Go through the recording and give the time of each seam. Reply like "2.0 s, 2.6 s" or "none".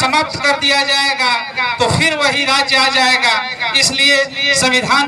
none